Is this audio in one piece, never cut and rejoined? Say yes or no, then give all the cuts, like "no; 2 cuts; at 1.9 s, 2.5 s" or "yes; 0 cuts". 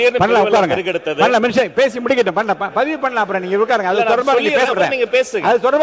yes; 0 cuts